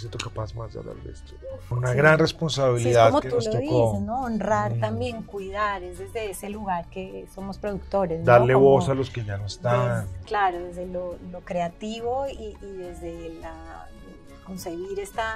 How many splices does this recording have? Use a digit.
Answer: 1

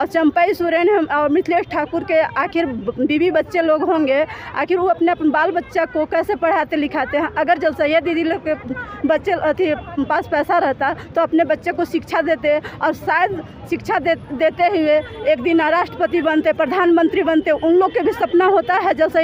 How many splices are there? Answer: 0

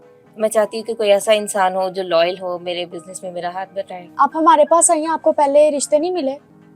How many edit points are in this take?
1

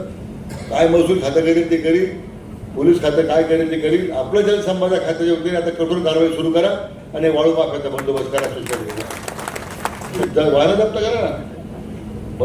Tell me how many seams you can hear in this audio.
1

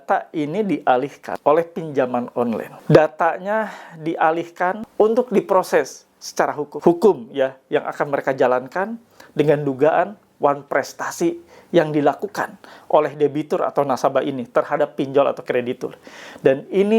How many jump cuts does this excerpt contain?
4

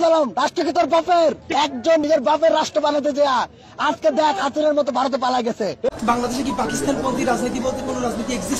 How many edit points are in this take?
2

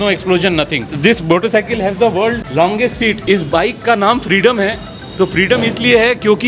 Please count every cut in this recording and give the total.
2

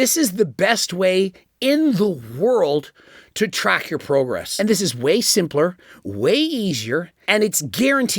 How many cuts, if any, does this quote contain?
2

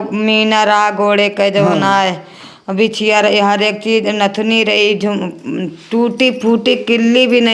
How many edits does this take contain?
0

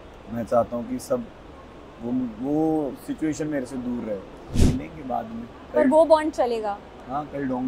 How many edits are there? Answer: 1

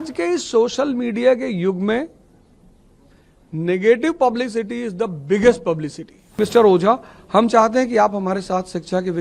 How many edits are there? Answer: 1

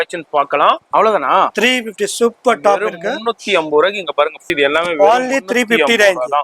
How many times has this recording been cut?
2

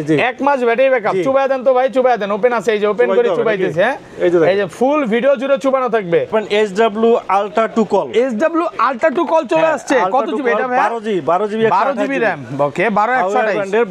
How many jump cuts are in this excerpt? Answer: 1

